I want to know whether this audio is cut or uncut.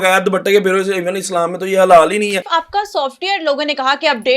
cut